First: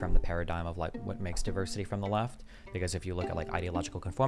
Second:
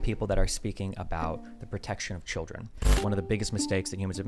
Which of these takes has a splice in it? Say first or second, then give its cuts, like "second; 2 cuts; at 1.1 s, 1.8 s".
second; 1 cut; at 3.0 s